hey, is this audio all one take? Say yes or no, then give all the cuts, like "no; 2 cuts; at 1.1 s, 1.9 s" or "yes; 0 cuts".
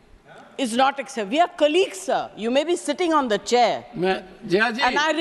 yes; 0 cuts